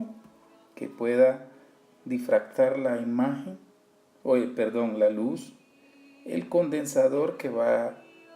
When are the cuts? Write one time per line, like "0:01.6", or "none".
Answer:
0:01.2